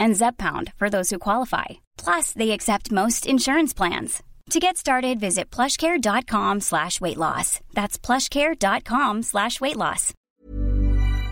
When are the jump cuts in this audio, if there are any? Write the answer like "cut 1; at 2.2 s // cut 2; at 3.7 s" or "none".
cut 1; at 10.4 s